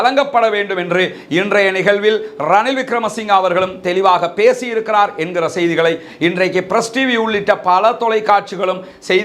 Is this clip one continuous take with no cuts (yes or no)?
yes